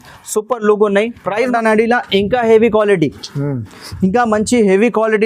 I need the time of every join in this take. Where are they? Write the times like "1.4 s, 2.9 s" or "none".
1.5 s

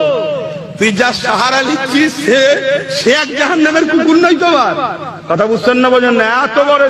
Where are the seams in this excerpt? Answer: none

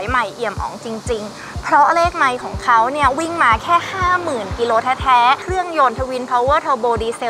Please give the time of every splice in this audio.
5.4 s

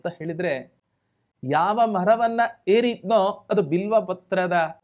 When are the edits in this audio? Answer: none

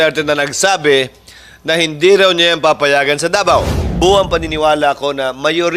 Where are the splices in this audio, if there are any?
3.8 s

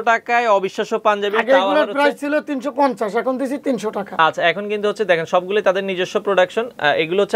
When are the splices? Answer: none

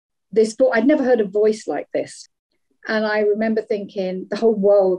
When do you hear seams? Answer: 2.2 s

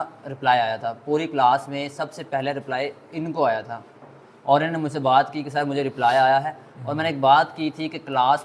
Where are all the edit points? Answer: none

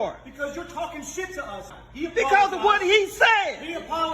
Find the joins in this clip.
1.8 s

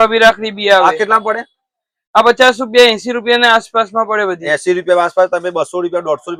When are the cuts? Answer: none

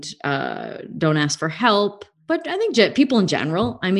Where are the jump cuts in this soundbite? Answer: 2.2 s

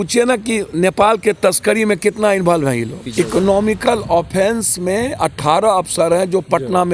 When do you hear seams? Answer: 3.0 s

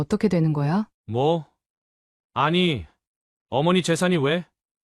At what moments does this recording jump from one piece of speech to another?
0.9 s

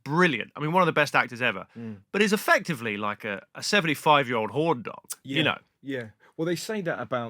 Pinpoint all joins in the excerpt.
none

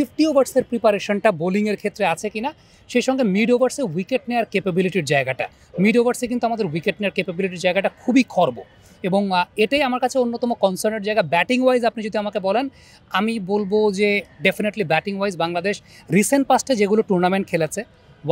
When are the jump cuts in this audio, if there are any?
none

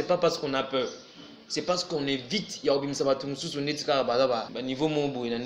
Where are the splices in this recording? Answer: 4.5 s

